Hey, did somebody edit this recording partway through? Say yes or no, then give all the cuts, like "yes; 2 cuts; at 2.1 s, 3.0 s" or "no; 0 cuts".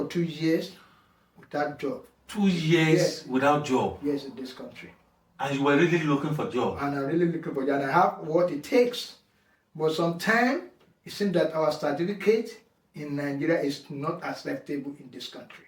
no; 0 cuts